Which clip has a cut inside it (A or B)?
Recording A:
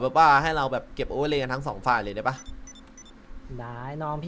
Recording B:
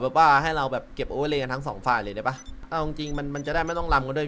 B